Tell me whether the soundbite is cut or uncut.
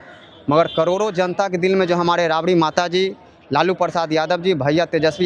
uncut